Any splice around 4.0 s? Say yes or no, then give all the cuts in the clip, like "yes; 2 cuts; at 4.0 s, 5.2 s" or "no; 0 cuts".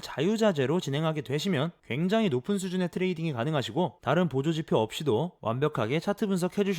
yes; 3 cuts; at 1.8 s, 4.0 s, 5.3 s